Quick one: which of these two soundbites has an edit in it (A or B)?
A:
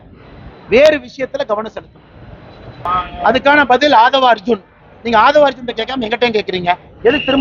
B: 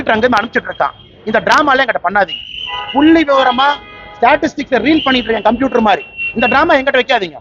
A